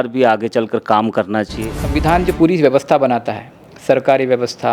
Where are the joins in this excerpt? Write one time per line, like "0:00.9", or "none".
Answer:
0:01.8